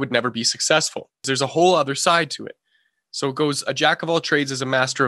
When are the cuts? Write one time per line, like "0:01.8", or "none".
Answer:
0:01.2